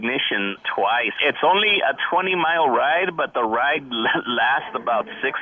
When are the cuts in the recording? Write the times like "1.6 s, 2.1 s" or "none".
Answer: 1.2 s